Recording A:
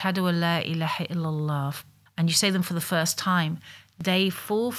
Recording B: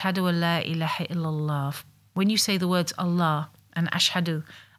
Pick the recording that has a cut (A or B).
A